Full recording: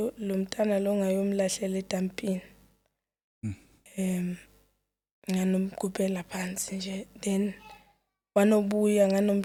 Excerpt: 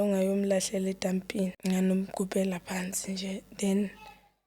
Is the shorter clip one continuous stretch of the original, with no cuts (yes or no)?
no